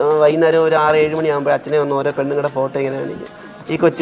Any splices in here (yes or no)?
no